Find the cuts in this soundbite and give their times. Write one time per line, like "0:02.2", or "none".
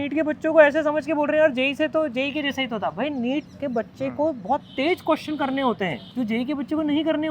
0:03.5
0:06.0